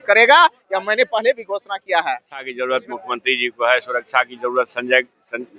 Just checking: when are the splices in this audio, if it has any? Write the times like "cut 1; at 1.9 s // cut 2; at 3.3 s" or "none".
cut 1; at 2.5 s